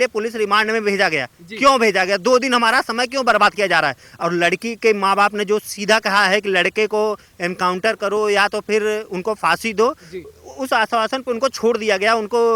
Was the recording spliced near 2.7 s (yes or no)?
no